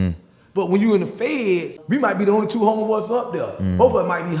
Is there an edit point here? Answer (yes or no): yes